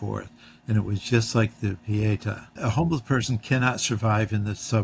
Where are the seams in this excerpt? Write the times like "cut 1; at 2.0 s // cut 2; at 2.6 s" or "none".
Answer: cut 1; at 2.5 s